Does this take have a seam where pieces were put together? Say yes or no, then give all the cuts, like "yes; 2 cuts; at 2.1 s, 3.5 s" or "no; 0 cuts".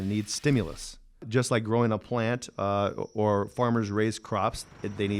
yes; 1 cut; at 1.2 s